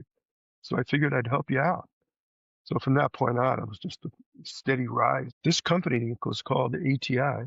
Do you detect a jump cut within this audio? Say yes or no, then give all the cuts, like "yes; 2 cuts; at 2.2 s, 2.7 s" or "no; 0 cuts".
yes; 1 cut; at 5.3 s